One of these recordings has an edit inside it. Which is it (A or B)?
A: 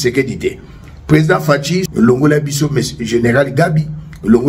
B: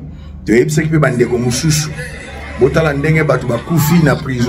A